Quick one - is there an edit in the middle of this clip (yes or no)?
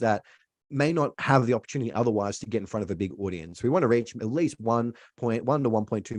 no